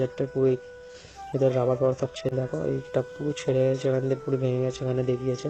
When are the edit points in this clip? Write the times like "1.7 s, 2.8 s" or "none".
2.3 s